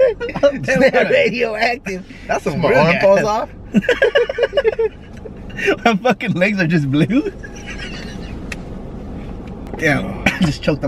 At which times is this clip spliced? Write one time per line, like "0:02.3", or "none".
0:09.7